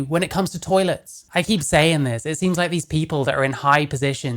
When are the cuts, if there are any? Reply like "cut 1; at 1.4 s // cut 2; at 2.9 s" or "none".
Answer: cut 1; at 1.1 s